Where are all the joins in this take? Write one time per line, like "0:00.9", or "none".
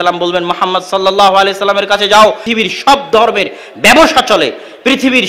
0:02.4